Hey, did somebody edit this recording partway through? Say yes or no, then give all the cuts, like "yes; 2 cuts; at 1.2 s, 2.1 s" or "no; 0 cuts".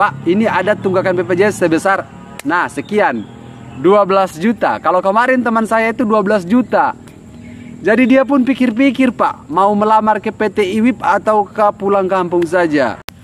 no; 0 cuts